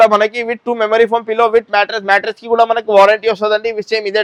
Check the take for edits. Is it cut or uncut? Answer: uncut